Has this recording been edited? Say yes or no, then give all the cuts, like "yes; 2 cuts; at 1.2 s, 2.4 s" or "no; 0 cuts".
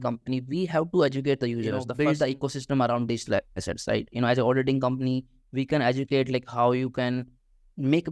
yes; 1 cut; at 1.8 s